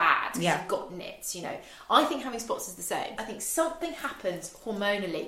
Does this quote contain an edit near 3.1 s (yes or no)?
yes